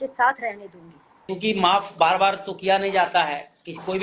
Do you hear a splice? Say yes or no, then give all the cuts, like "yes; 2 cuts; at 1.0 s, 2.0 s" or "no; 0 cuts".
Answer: yes; 1 cut; at 1.3 s